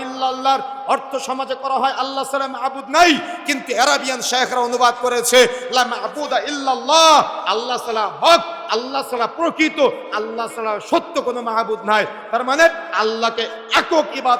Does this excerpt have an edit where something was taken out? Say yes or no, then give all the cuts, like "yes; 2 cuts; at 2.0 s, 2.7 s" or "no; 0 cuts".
no; 0 cuts